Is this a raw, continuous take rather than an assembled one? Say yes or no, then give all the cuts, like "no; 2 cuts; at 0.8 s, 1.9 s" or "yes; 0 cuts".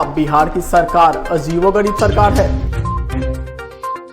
no; 1 cut; at 2.5 s